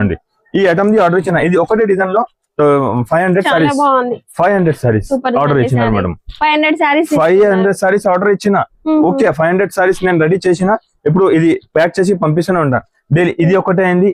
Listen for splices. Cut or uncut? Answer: uncut